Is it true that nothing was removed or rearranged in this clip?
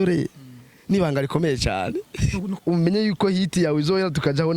no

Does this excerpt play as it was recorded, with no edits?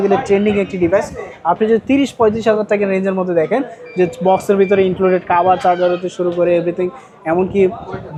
yes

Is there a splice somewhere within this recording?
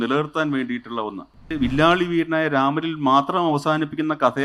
yes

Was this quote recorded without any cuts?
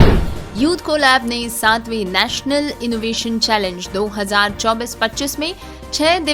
yes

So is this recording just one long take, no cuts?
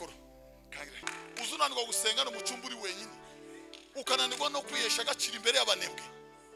no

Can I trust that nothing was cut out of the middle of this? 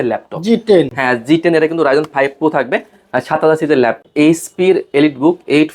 no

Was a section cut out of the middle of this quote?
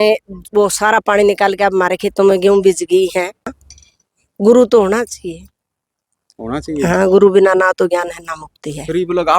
yes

